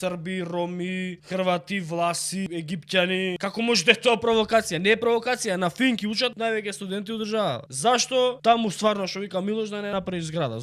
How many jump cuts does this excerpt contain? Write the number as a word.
seven